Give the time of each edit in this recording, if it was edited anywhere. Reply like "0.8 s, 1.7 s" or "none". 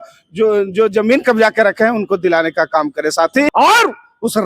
3.5 s